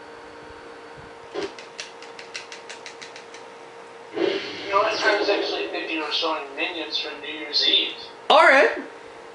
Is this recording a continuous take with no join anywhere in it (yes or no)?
yes